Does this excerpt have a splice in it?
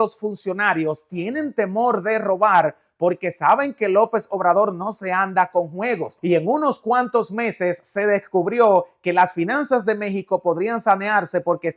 no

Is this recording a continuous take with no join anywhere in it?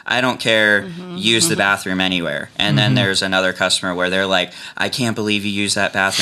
yes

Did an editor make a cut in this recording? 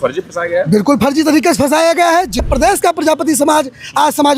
yes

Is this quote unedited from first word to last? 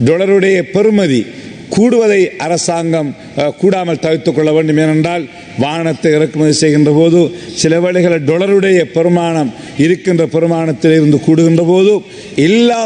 yes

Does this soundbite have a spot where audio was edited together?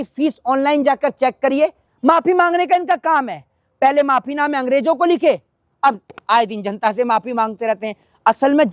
yes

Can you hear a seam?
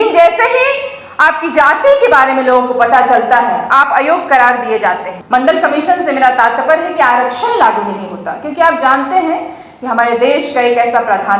yes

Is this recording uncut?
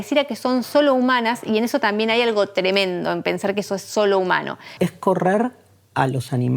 no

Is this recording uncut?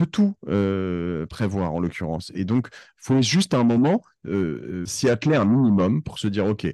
no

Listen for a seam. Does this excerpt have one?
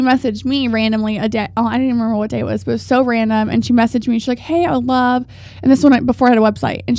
no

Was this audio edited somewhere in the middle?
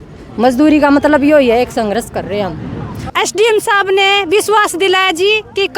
yes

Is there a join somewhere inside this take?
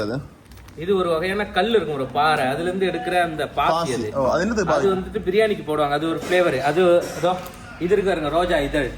no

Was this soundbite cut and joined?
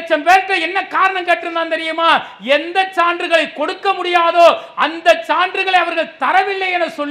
no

